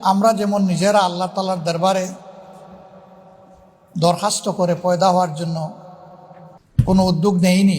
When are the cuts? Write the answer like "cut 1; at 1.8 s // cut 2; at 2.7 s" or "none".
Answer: cut 1; at 6.6 s